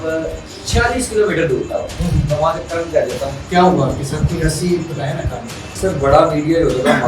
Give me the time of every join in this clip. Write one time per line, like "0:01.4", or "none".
0:03.4
0:05.6